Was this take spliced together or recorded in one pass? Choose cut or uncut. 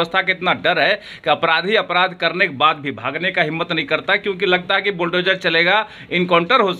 uncut